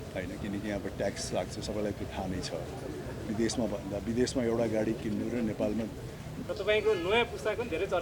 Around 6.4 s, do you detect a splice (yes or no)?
yes